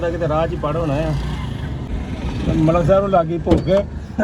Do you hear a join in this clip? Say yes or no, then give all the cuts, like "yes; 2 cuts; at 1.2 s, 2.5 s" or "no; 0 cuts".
yes; 1 cut; at 1.9 s